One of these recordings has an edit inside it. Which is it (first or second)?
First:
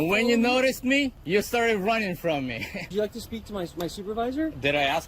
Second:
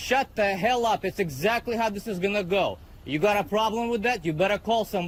first